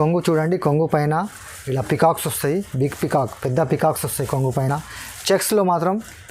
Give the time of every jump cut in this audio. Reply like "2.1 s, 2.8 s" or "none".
none